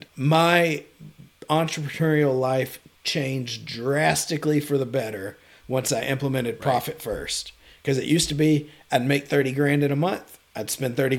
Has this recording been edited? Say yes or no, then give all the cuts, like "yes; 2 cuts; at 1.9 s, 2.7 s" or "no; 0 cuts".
no; 0 cuts